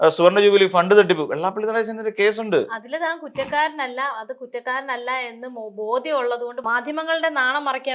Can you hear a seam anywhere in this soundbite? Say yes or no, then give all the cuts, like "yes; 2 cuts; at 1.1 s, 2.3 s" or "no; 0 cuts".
yes; 1 cut; at 6.6 s